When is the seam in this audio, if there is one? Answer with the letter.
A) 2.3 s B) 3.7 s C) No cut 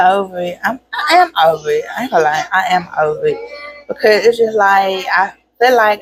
C